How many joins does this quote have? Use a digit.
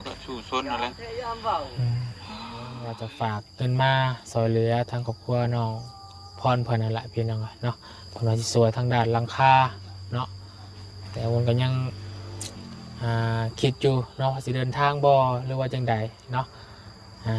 1